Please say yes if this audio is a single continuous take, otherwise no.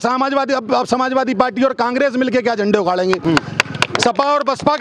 yes